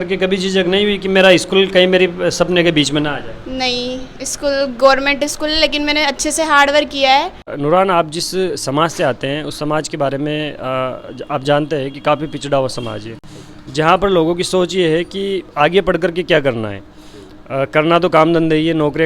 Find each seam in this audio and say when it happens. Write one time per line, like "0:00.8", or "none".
0:07.5